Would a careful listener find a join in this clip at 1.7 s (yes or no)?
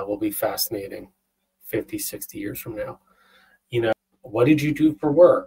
no